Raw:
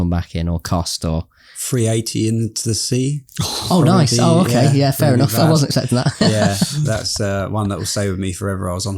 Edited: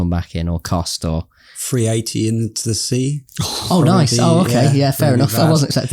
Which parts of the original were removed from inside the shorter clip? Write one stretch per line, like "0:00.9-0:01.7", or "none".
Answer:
none